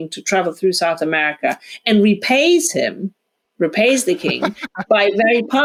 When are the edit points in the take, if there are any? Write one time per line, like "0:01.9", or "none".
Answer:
none